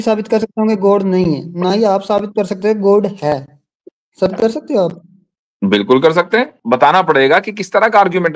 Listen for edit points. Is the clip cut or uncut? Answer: cut